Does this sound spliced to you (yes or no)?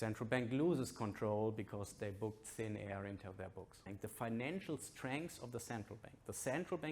yes